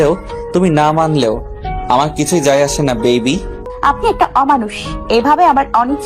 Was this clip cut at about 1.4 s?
no; 1 cut; at 3.6 s

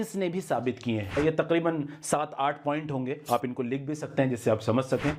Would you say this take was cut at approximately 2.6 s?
no; 1 cut; at 1.2 s

